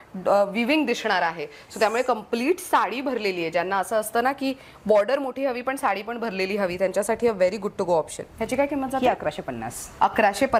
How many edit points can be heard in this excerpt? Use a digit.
0